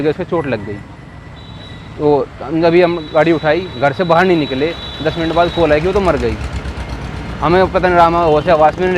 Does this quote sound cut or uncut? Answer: uncut